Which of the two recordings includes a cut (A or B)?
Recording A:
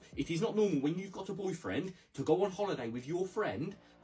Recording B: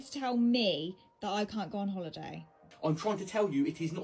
B